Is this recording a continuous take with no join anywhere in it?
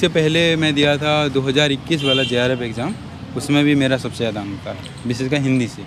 yes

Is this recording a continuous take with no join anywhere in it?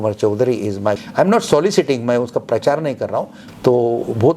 no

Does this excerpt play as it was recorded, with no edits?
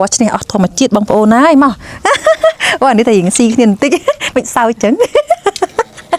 yes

